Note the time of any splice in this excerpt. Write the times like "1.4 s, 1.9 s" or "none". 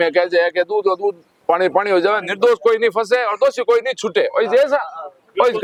none